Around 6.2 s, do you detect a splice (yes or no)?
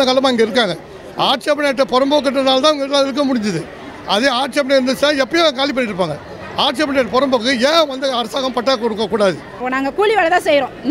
no